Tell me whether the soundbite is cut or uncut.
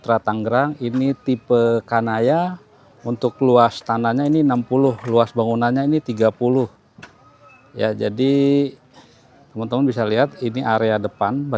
uncut